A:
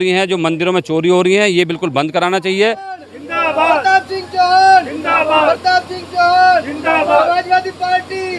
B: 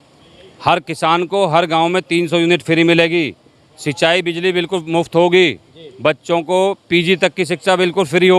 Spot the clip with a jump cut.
A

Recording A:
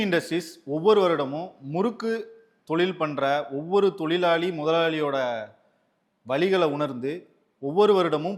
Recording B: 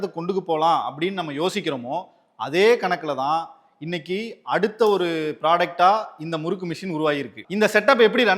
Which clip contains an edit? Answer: B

